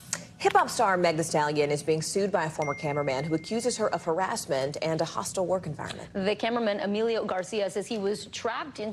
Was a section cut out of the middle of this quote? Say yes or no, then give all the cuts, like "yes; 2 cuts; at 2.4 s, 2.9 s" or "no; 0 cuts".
no; 0 cuts